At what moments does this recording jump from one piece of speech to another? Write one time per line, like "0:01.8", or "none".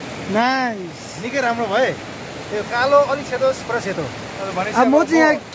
0:04.4